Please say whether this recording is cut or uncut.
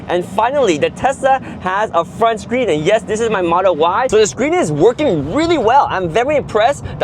cut